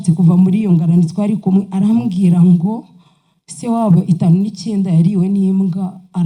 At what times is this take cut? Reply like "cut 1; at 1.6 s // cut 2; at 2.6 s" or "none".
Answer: none